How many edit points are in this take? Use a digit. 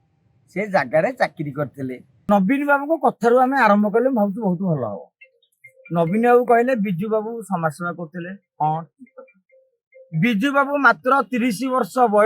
1